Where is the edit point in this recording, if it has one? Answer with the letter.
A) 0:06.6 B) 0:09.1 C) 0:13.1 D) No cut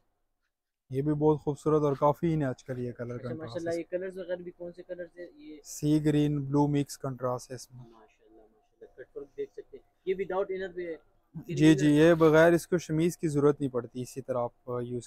D